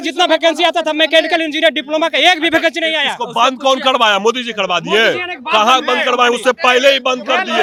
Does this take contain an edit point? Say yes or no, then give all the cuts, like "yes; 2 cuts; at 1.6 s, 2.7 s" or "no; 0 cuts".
no; 0 cuts